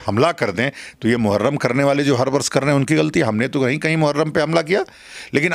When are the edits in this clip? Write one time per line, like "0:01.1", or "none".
none